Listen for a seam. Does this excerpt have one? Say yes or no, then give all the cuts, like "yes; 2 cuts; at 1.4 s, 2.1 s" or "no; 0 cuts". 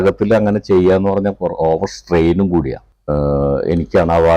yes; 1 cut; at 2.8 s